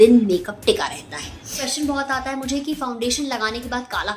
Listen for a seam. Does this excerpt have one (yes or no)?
yes